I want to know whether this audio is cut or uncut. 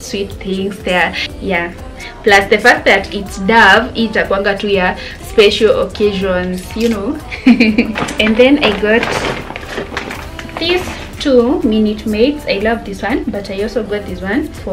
cut